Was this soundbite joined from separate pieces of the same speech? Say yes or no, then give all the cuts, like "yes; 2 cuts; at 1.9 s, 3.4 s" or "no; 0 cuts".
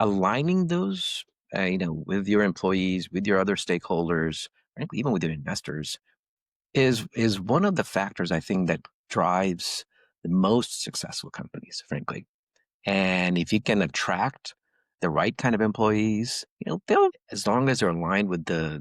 yes; 1 cut; at 17.2 s